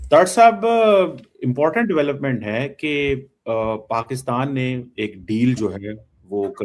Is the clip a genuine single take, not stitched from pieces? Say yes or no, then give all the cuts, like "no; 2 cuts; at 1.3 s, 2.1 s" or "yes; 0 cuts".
yes; 0 cuts